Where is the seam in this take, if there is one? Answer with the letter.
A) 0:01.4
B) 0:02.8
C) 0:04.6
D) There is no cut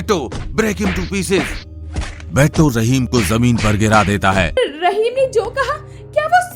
C